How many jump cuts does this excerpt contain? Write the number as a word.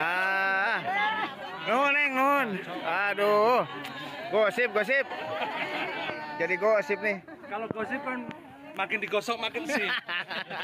zero